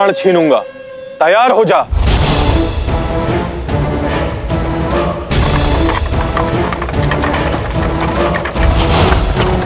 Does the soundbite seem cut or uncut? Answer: uncut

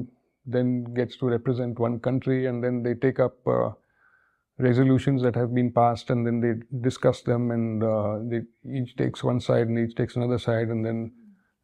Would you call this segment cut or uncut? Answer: uncut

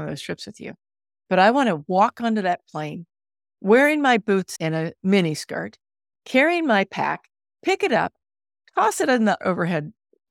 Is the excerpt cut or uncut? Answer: cut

